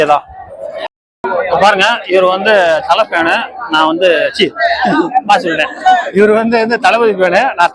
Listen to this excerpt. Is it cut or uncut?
cut